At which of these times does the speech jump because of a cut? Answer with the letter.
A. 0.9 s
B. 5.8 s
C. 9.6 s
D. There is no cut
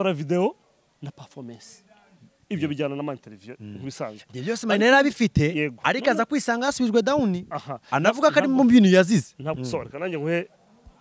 C